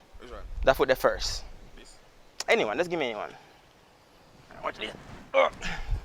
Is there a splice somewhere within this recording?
no; 0 cuts

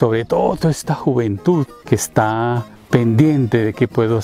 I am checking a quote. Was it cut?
yes; 2 cuts; at 1.8 s, 2.7 s

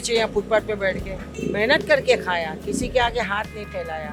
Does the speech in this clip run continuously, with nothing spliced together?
yes; 0 cuts

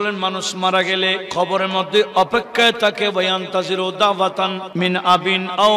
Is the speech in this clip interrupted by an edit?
yes; 2 cuts; at 1.2 s, 4.6 s

